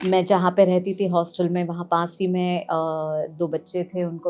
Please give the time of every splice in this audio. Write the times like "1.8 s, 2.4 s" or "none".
none